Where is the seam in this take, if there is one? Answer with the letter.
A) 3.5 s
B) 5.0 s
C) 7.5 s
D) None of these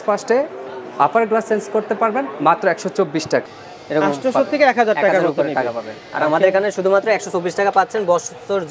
A